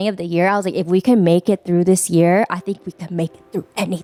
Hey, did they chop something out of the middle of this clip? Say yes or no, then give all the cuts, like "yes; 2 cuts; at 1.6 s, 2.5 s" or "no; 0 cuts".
no; 0 cuts